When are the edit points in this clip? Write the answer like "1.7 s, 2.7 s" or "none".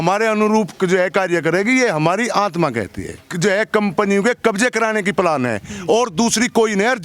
3.3 s